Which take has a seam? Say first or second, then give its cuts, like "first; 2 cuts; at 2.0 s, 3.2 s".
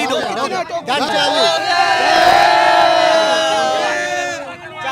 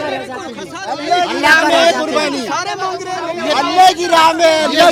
first; 1 cut; at 1.1 s